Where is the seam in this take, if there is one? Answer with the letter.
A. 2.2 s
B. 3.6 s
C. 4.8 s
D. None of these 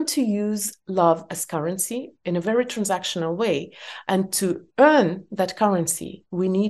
D